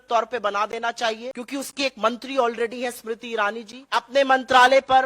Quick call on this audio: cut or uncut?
cut